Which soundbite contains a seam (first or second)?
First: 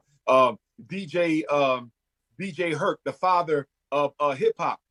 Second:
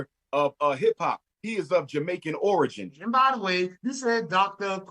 second